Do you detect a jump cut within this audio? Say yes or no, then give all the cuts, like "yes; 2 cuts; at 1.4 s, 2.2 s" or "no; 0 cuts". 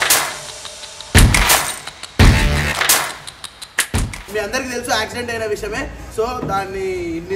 no; 0 cuts